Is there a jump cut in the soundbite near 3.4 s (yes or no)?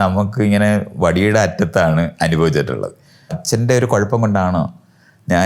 yes